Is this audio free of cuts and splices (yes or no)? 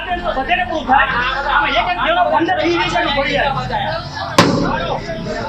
yes